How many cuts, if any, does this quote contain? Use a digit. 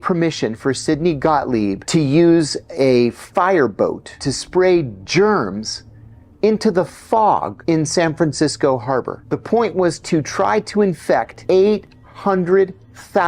5